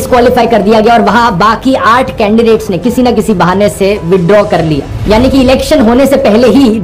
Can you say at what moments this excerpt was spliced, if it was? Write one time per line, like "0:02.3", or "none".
none

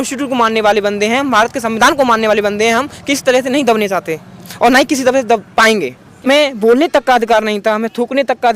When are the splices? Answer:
0:06.3

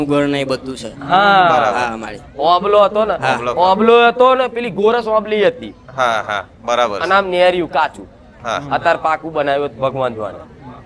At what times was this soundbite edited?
none

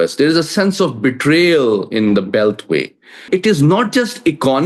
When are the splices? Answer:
0:03.2

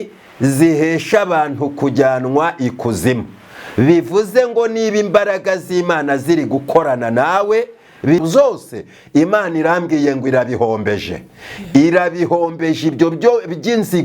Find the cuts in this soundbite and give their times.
0:08.2

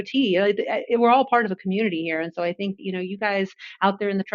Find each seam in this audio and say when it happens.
0:02.8

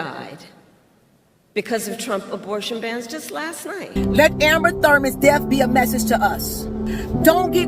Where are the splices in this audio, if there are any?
0:03.9

